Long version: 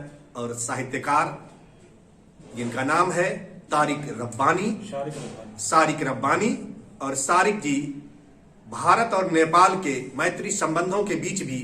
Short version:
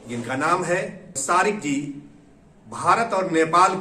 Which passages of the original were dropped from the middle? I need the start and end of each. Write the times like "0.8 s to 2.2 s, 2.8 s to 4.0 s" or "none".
3.5 s to 7.1 s